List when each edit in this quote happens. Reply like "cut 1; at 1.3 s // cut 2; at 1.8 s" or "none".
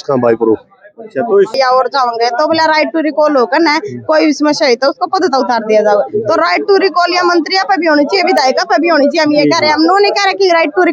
cut 1; at 1.5 s